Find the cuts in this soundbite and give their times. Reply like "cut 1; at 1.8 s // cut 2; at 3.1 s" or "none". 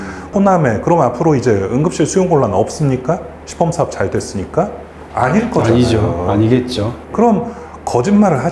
none